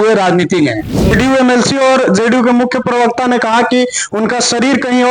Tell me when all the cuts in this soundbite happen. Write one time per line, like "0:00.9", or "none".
0:01.1